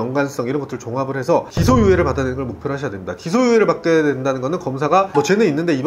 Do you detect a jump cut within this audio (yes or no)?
no